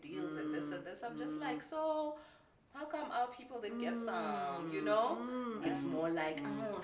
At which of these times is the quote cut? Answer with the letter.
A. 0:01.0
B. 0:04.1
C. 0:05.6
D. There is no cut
C